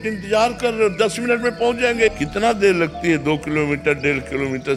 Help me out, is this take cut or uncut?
uncut